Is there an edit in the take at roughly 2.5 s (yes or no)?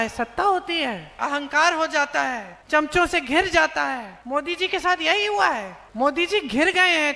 yes